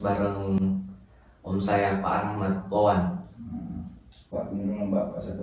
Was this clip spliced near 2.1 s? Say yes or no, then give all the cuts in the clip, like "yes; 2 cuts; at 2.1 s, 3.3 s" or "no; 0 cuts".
no; 1 cut; at 4.3 s